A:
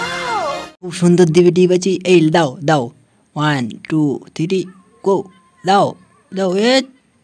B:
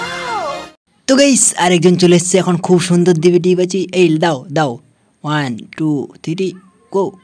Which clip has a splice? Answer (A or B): A